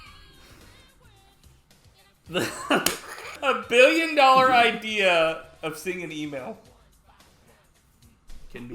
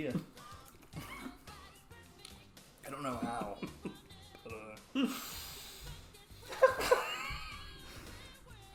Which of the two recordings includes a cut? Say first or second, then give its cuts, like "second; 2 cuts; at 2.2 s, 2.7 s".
first; 1 cut; at 3.2 s